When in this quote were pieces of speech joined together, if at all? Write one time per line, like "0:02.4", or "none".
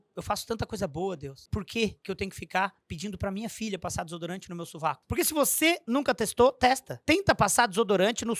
0:01.3
0:02.0
0:05.0
0:06.9